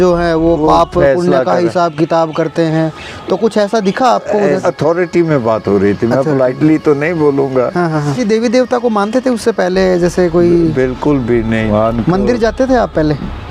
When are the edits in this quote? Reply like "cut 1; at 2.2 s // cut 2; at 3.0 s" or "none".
cut 1; at 4.6 s // cut 2; at 8.2 s // cut 3; at 11.7 s